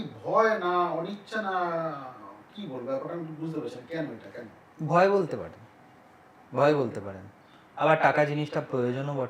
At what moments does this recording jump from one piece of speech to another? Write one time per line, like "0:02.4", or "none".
none